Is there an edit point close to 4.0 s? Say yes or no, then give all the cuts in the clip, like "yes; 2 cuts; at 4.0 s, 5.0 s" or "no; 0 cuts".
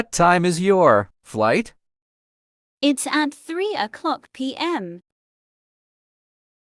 no; 1 cut; at 1.1 s